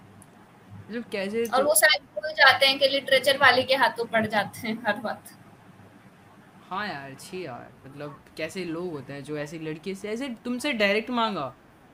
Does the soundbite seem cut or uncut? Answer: uncut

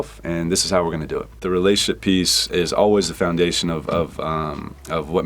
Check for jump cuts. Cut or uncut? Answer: cut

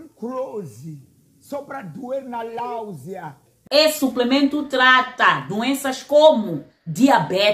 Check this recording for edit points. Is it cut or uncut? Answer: cut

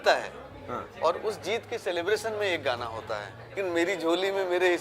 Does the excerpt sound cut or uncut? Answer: cut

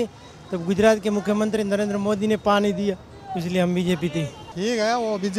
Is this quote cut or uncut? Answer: cut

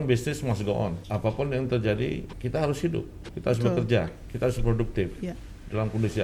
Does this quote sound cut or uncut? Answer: cut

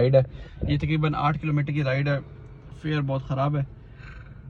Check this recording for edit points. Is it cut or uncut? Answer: uncut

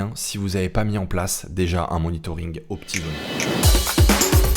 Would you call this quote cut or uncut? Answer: cut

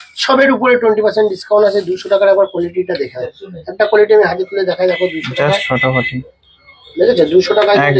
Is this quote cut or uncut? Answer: uncut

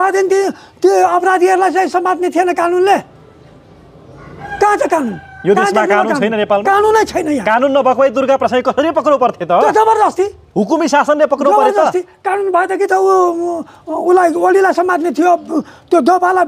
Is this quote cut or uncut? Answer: uncut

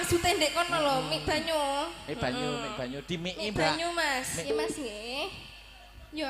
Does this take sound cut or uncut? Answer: cut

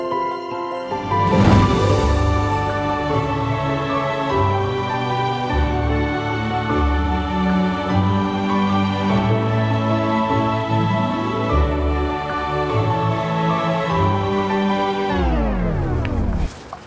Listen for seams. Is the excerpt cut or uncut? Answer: uncut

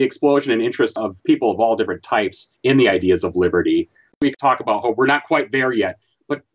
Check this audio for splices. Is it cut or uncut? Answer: cut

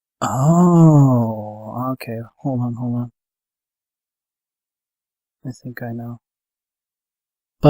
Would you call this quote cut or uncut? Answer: cut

